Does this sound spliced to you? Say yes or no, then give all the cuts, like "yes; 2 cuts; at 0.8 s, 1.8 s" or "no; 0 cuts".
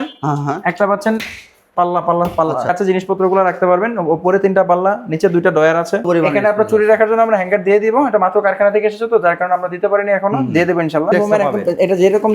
yes; 3 cuts; at 2.7 s, 6.0 s, 11.1 s